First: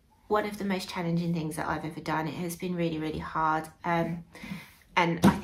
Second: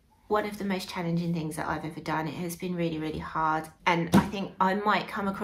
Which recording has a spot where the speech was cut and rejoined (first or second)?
second